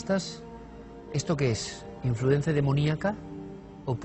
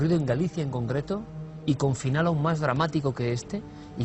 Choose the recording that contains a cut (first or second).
first